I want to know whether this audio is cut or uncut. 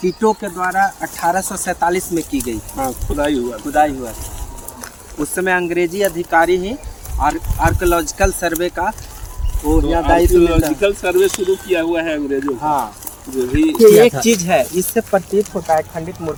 uncut